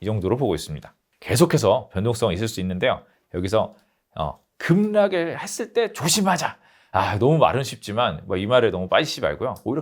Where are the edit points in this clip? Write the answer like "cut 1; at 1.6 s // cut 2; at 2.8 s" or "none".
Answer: none